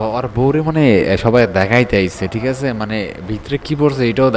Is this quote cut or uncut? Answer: uncut